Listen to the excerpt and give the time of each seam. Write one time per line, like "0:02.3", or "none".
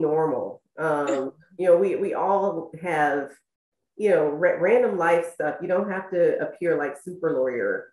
none

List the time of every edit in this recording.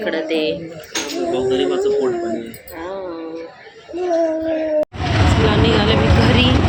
0:04.8

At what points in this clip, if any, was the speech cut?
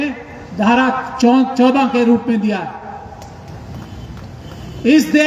none

